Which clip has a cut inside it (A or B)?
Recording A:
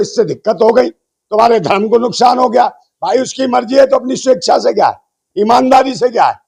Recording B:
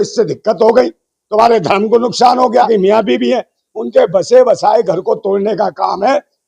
B